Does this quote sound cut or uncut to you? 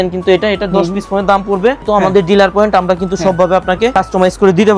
cut